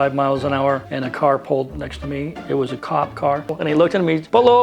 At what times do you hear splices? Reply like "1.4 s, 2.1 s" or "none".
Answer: 3.5 s